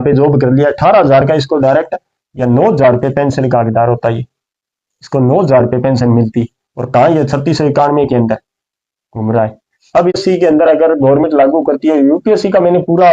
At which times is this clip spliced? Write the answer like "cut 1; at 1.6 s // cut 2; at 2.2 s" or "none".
cut 1; at 10.2 s